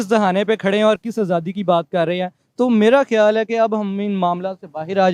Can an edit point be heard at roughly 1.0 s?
no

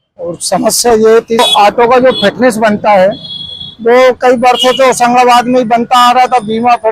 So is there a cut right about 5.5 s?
no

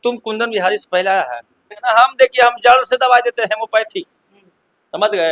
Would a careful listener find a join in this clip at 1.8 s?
yes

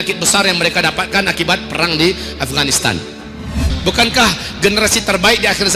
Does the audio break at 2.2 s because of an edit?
no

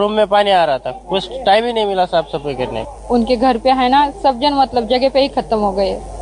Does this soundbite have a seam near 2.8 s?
yes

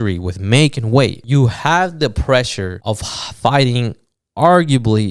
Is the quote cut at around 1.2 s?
yes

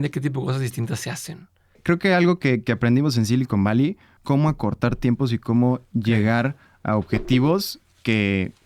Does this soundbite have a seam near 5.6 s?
no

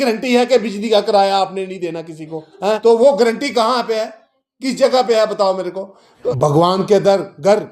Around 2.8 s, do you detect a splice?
yes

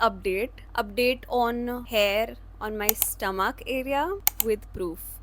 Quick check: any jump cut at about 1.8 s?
yes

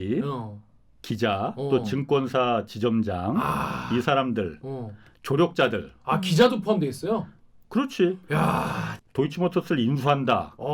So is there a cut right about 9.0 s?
yes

